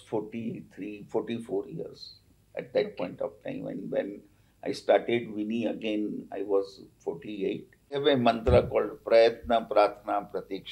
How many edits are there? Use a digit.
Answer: 1